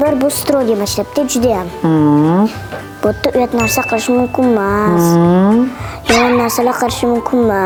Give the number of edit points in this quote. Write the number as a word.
zero